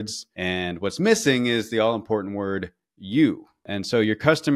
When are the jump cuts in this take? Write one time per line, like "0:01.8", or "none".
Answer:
0:03.6